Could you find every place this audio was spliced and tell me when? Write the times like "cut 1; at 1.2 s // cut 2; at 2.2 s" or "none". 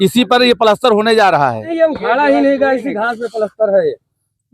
cut 1; at 1.6 s

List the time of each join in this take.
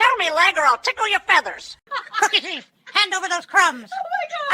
cut 1; at 1.8 s

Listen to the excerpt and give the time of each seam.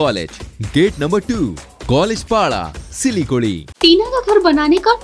cut 1; at 3.7 s

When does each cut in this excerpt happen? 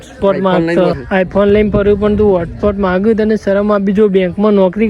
cut 1; at 1.0 s

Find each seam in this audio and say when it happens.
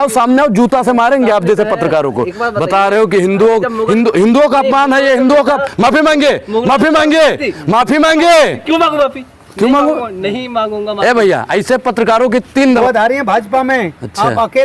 cut 1; at 12.8 s

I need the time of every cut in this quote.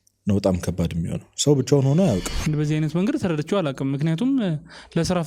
cut 1; at 2.3 s

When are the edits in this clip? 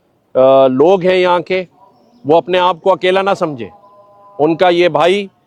none

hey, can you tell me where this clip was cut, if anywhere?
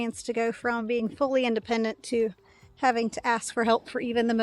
none

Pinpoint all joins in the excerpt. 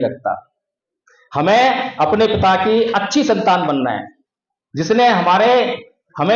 none

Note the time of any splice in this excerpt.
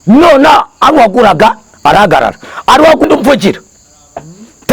cut 1; at 3.0 s

